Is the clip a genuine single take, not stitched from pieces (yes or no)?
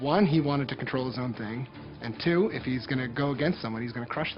yes